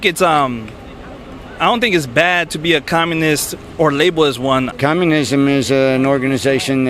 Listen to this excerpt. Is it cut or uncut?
cut